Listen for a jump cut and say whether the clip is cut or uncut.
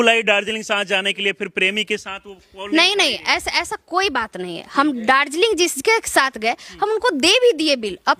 uncut